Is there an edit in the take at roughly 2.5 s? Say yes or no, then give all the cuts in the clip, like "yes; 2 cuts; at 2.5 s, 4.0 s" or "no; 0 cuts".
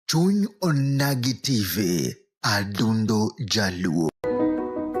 no; 1 cut; at 4.1 s